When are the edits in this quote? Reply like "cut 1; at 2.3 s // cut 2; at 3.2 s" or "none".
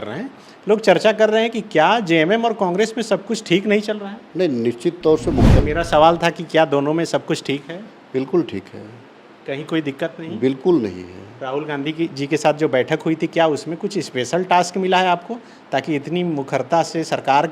cut 1; at 5.6 s